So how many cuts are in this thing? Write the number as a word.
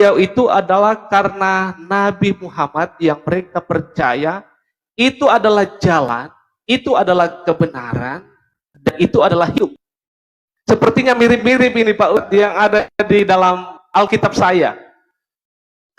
one